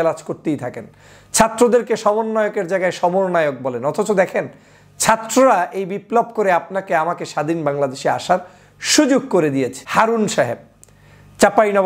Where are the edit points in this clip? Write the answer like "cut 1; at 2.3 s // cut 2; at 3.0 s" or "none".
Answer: cut 1; at 9.8 s